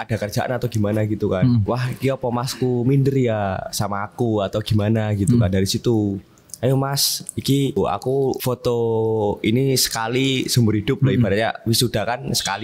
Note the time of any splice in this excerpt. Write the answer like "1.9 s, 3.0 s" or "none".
1.6 s, 8.1 s